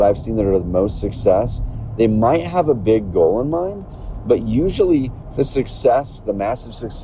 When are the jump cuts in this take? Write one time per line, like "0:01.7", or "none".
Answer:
none

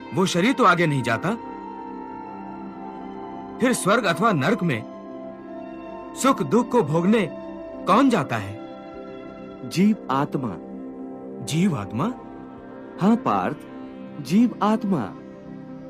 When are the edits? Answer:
0:01.4
0:03.4

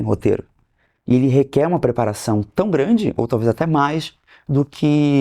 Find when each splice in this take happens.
none

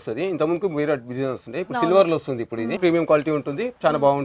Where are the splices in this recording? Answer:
0:02.7

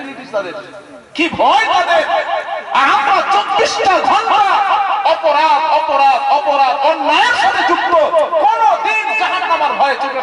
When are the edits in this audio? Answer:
none

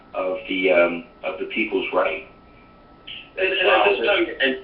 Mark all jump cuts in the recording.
0:01.4

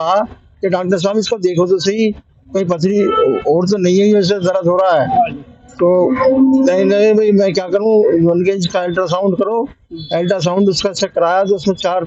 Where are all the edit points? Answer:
none

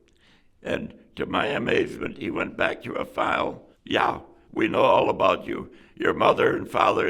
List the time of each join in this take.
0:03.7

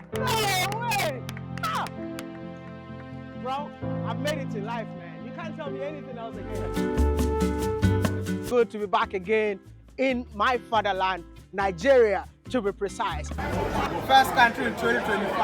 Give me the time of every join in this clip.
0:08.5
0:13.9

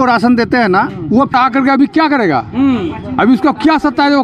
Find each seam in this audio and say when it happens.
0:01.3

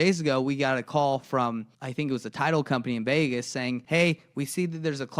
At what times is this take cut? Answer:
0:01.8
0:03.8

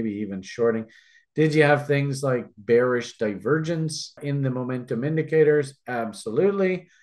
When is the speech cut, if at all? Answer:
0:04.2

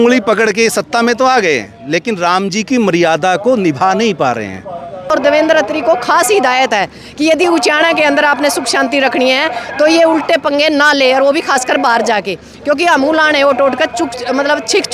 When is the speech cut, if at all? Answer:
0:05.1

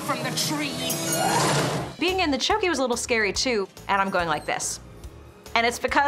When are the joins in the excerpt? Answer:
0:02.0
0:03.7

